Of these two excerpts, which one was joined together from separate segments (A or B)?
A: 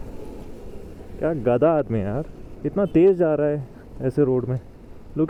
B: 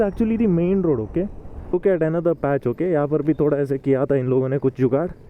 B